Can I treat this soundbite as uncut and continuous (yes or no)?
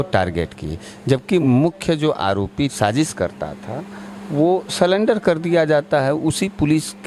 no